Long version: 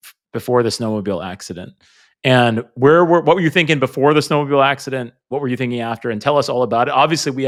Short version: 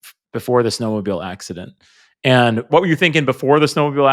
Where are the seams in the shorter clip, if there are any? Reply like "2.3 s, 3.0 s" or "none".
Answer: 2.7 s

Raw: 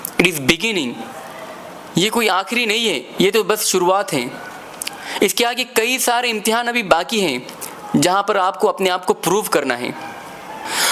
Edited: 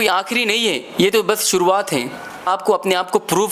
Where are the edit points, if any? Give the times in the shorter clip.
2.5 s

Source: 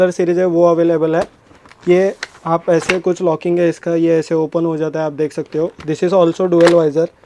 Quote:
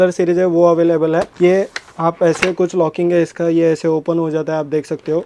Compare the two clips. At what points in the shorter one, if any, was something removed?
1.3 s

